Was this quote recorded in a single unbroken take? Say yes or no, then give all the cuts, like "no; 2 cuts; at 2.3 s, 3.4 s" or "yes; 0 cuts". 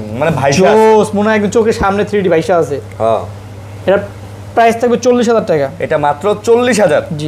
yes; 0 cuts